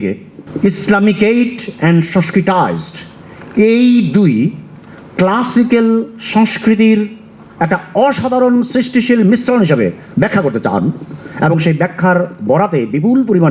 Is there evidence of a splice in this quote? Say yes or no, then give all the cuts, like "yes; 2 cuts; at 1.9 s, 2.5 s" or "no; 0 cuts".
no; 0 cuts